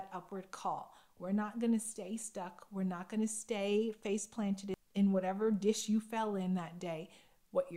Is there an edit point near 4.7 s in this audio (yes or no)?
yes